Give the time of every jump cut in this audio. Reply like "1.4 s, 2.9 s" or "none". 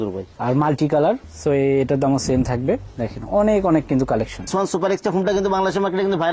1.3 s, 4.5 s